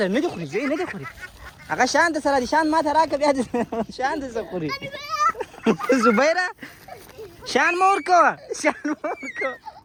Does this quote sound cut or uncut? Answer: uncut